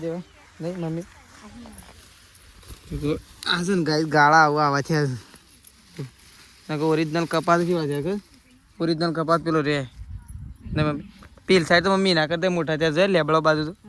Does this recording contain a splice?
no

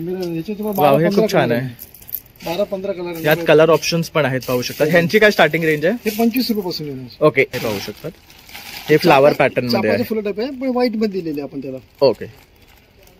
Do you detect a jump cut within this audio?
yes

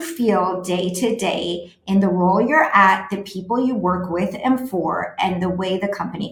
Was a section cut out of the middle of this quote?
no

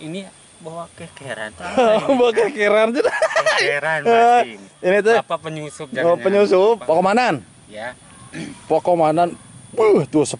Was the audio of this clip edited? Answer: yes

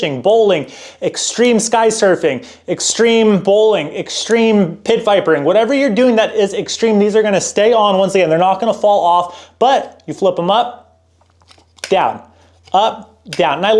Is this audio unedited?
yes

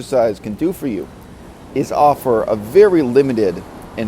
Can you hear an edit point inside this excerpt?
yes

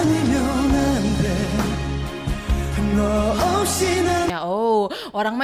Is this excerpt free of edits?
yes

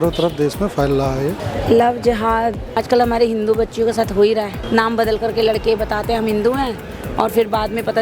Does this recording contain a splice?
yes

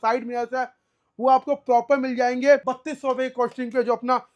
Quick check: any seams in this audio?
yes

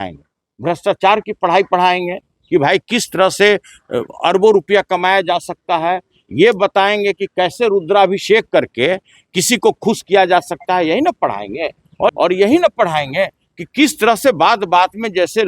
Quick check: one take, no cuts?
no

